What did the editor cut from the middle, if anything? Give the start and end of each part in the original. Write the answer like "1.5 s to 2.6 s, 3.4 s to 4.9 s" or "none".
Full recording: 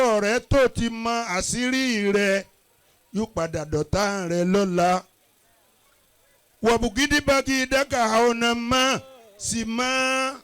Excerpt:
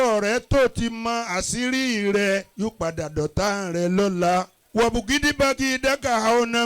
2.5 s to 3.1 s, 5.1 s to 6.5 s